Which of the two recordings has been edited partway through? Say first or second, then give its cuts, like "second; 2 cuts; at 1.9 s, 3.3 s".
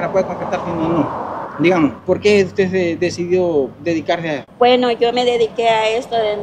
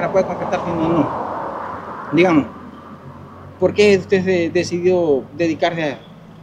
first; 3 cuts; at 1.4 s, 2.0 s, 4.5 s